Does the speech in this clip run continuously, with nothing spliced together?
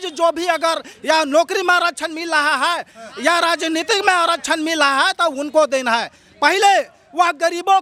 yes; 0 cuts

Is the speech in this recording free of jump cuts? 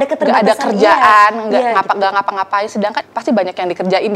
no; 1 cut; at 3.1 s

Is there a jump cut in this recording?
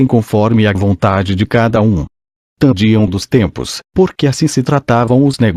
no; 0 cuts

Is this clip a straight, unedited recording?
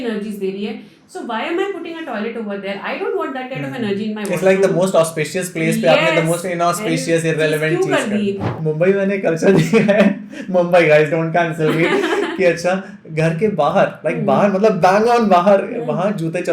no; 1 cut; at 8.5 s

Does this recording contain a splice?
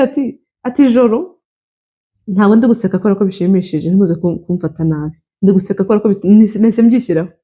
no; 0 cuts

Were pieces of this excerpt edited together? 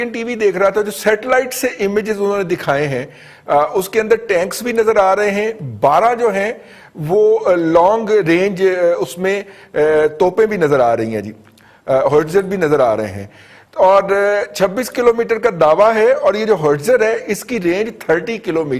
no; 0 cuts

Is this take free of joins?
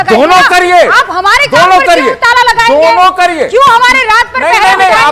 yes; 0 cuts

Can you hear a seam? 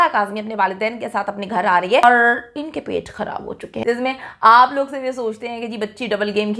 yes; 2 cuts; at 2.0 s, 3.7 s

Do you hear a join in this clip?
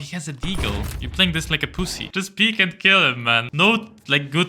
yes; 2 cuts; at 2.0 s, 3.5 s

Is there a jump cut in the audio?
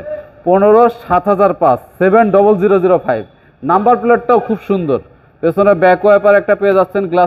no; 0 cuts

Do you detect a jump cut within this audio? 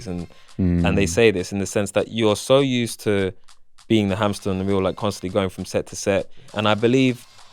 yes; 1 cut; at 6.4 s

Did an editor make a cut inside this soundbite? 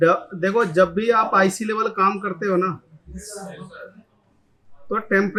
no; 0 cuts

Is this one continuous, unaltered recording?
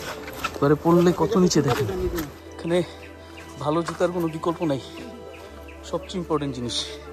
no; 1 cut; at 2.4 s

